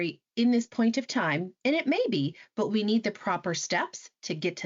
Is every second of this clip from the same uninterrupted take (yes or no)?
yes